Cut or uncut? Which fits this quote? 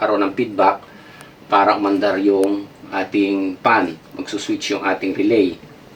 uncut